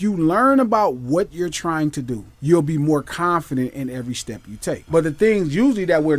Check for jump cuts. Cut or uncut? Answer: cut